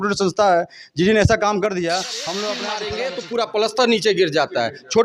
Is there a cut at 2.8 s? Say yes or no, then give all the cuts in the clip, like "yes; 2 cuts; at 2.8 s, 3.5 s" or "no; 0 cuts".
yes; 1 cut; at 2.8 s